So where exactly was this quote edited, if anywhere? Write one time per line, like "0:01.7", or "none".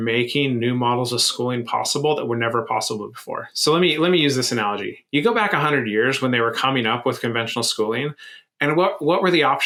none